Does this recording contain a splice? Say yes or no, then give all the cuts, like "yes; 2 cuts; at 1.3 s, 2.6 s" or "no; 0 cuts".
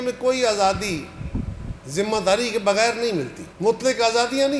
no; 0 cuts